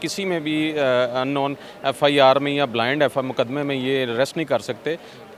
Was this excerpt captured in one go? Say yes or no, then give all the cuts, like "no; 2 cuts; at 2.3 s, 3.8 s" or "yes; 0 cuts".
yes; 0 cuts